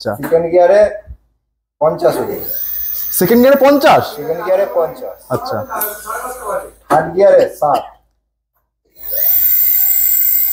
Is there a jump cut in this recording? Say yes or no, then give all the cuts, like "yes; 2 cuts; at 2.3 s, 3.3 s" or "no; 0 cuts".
no; 0 cuts